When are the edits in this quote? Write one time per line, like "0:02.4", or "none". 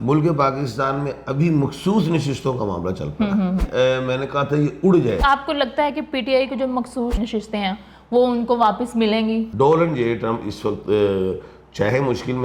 0:03.6
0:05.2
0:07.2
0:09.5